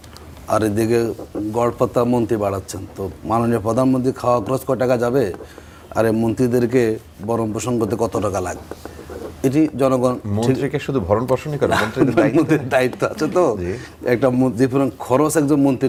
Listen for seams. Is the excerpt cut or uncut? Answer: uncut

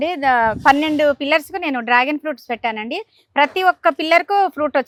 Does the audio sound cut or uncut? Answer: uncut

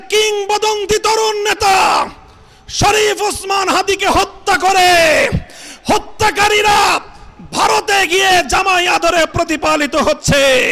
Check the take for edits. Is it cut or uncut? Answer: uncut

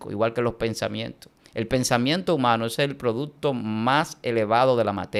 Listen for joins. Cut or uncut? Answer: uncut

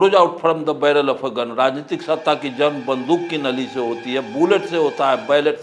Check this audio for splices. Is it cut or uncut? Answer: uncut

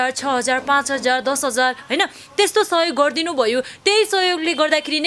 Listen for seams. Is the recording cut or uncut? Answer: uncut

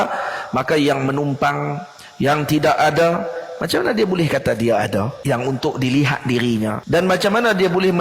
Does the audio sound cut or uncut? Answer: cut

